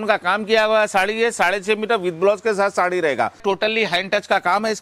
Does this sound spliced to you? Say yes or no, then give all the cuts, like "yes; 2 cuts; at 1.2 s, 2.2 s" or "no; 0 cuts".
yes; 1 cut; at 3.4 s